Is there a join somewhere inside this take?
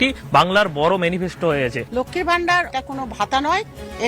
yes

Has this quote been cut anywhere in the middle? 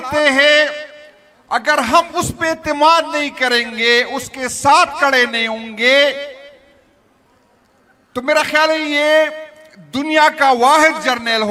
no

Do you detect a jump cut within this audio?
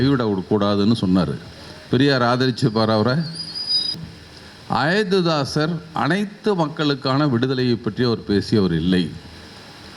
yes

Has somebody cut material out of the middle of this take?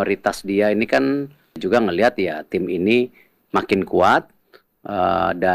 yes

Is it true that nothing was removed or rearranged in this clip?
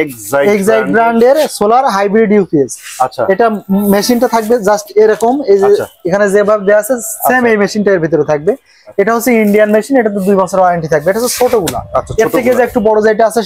yes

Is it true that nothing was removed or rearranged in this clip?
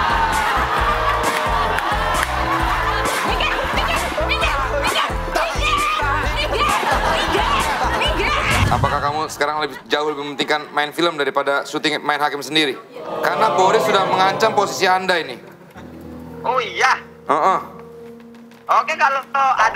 no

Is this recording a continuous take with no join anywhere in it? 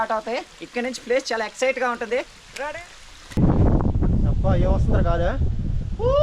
no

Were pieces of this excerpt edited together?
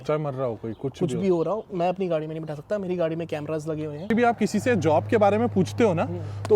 yes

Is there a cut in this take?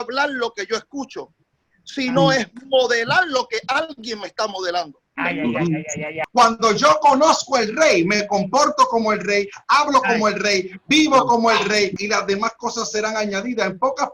yes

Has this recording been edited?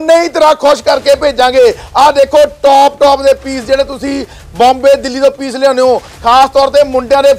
no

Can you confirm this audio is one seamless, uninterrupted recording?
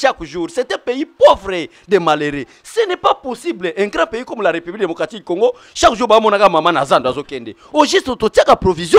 yes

